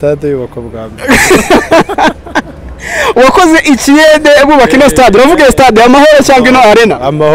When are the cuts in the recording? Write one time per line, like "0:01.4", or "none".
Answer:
none